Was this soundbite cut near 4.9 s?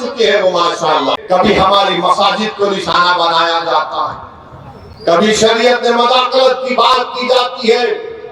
no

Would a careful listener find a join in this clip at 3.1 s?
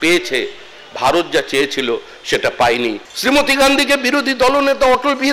yes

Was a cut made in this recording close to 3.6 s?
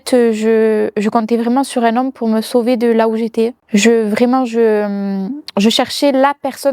yes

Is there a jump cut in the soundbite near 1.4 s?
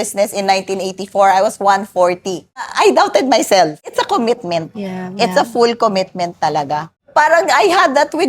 no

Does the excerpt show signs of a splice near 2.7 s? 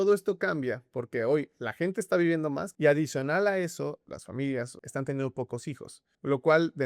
yes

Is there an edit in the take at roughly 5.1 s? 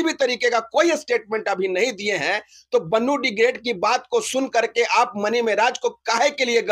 no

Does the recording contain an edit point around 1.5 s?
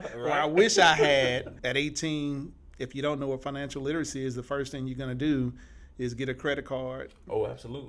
yes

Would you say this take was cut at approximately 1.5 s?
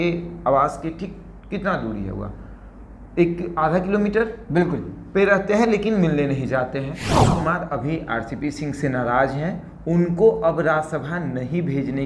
no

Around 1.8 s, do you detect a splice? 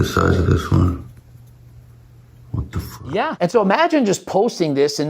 no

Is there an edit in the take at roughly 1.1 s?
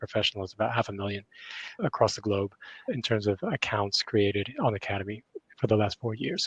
no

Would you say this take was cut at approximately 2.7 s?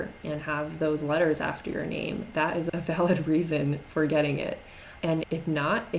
yes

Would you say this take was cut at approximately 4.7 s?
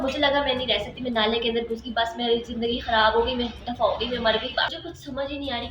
yes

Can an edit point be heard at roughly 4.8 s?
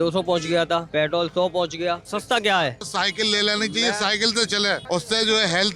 yes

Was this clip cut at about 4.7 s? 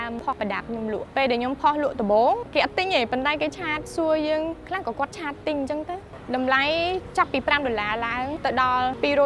no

